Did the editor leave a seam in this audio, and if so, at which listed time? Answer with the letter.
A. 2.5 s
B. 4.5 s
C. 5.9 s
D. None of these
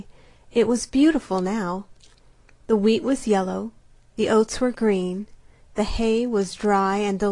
B